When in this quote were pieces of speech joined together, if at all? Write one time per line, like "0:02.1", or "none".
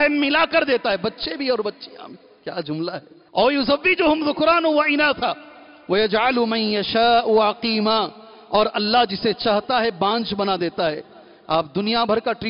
0:03.1